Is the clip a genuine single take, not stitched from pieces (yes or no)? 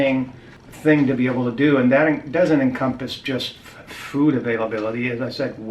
yes